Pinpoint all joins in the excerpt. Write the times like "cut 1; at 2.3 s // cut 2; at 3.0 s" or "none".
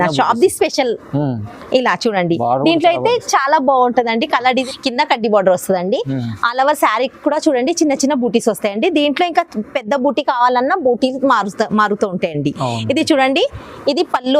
cut 1; at 4.6 s